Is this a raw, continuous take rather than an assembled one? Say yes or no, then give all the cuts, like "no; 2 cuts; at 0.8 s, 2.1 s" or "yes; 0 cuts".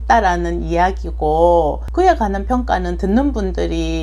yes; 0 cuts